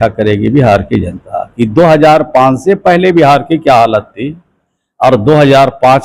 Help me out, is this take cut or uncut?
uncut